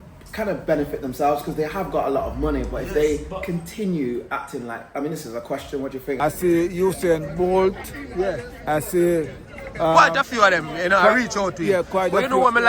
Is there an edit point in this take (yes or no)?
yes